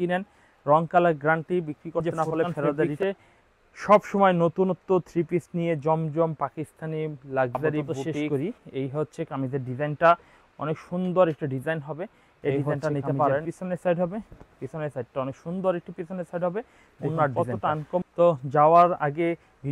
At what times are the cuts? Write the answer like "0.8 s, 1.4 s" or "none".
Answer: 2.9 s, 8.3 s, 13.4 s, 18.0 s